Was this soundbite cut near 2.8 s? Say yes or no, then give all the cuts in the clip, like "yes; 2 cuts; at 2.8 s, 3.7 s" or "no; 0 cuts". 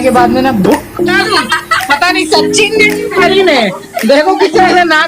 no; 1 cut; at 1.0 s